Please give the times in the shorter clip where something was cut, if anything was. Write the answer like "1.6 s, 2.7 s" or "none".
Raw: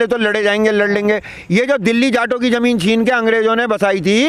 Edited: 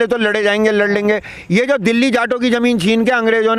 none

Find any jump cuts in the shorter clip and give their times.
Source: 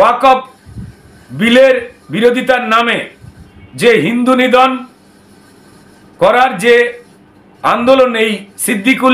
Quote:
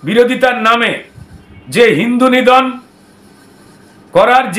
none

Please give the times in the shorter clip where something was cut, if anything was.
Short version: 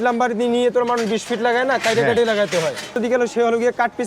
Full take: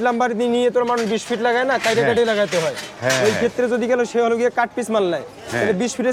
3.0 s

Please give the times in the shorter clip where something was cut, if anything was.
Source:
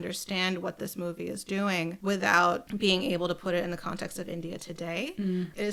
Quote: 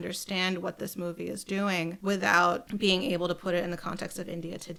none

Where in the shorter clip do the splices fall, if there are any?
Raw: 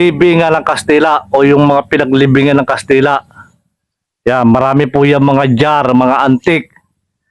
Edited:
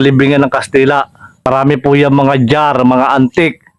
1.5 s

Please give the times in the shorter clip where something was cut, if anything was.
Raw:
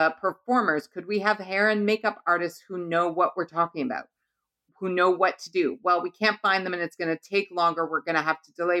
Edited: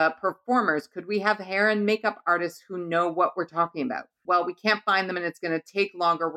4.2 s

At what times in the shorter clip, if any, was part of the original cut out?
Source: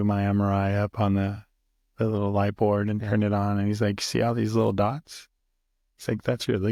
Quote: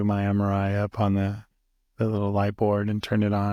none

